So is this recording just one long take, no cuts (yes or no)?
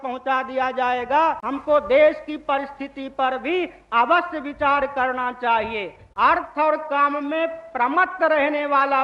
no